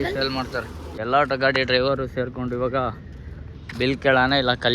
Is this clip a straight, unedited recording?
no; 1 cut; at 1.0 s

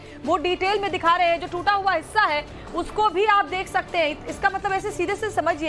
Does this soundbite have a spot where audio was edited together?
no; 0 cuts

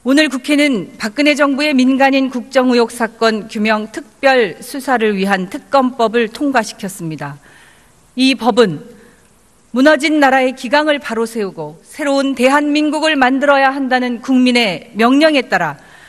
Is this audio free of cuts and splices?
no; 1 cut; at 14.5 s

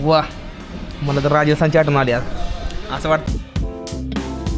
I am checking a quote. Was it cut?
yes; 1 cut; at 3.3 s

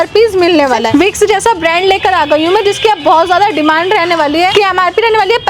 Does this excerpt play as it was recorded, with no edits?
yes; 0 cuts

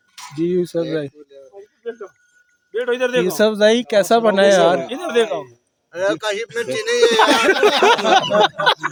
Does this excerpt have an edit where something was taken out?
no; 0 cuts

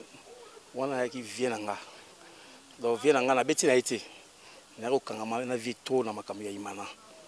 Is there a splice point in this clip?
no; 0 cuts

